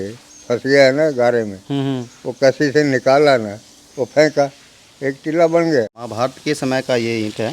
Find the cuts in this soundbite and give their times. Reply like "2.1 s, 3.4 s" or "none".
6.0 s